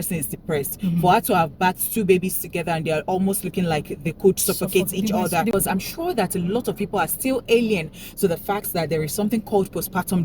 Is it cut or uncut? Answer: cut